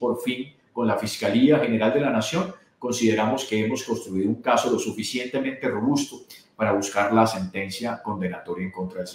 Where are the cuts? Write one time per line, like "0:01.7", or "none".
none